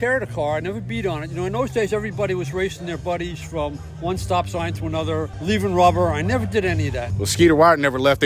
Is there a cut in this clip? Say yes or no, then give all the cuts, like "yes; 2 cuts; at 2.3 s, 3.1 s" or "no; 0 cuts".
yes; 2 cuts; at 5.3 s, 7.0 s